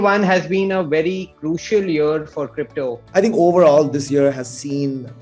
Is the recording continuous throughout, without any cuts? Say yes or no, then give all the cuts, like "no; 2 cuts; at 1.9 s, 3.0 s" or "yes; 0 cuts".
no; 1 cut; at 3.0 s